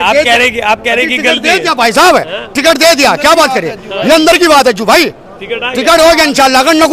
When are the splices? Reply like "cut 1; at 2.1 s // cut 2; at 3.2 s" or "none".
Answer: none